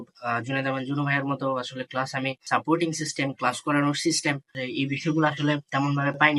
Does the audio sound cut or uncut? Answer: cut